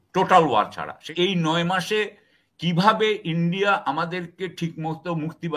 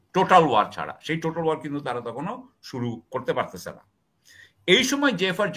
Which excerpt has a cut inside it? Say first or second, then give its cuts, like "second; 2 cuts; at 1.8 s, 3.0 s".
first; 1 cut; at 1.1 s